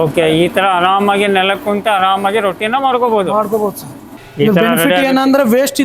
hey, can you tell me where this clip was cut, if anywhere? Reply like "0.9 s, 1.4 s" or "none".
4.2 s